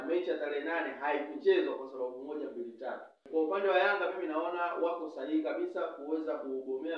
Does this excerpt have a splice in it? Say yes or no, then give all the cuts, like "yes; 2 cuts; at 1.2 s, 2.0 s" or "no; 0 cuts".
yes; 1 cut; at 3.1 s